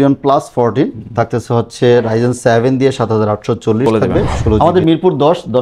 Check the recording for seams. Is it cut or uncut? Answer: cut